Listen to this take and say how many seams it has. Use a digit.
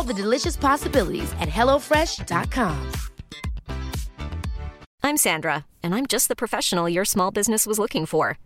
1